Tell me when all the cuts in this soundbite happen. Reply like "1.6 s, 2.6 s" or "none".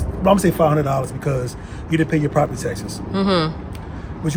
none